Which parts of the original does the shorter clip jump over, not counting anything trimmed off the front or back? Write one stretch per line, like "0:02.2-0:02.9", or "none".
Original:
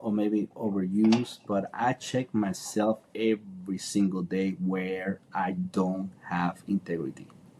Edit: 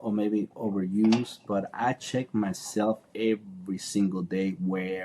none